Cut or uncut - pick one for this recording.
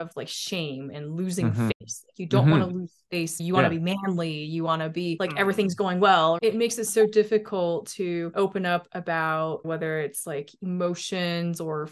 cut